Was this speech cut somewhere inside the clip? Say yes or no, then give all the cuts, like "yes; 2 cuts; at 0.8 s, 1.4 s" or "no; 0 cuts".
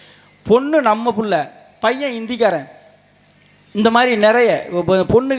no; 0 cuts